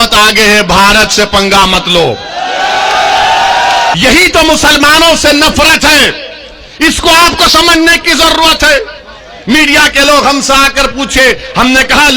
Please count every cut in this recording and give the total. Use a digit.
1